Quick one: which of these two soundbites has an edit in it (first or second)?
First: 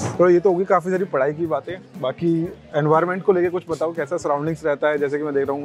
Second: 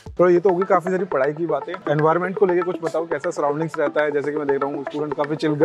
second